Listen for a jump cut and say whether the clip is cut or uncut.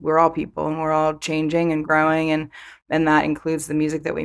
uncut